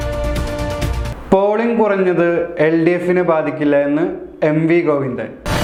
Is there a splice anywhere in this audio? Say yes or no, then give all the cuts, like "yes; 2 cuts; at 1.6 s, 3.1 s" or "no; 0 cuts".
no; 0 cuts